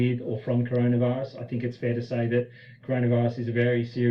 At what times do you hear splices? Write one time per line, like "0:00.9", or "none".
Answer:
0:01.7